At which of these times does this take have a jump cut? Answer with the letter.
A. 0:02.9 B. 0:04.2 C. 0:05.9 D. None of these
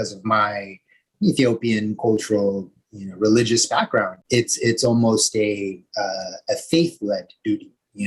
B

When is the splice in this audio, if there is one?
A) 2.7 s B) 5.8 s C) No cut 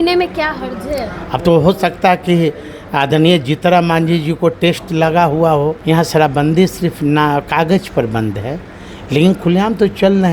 B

